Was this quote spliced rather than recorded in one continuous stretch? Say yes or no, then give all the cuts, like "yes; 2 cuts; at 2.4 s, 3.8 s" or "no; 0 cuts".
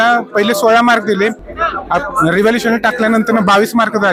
no; 0 cuts